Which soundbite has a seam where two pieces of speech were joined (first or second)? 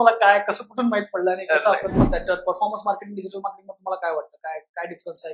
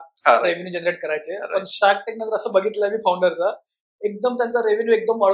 first